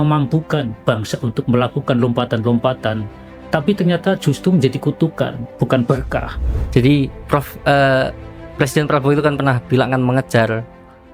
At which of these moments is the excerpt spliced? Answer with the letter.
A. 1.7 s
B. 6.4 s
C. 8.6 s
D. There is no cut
B